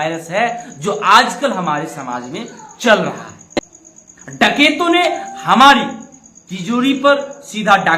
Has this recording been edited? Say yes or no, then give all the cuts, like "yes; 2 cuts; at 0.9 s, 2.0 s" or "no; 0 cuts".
no; 0 cuts